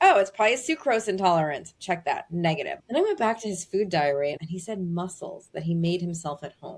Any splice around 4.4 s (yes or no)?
yes